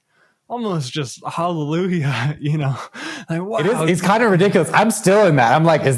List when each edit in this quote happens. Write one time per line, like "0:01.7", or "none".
none